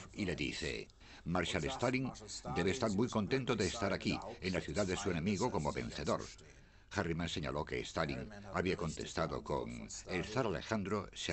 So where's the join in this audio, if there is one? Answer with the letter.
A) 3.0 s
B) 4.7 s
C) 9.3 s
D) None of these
C